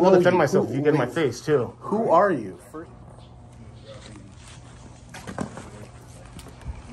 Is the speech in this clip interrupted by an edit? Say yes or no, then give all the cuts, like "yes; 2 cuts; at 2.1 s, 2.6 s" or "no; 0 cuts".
yes; 1 cut; at 2.6 s